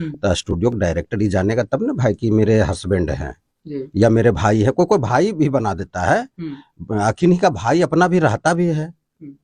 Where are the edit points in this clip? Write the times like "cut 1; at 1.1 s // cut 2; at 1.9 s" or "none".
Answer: none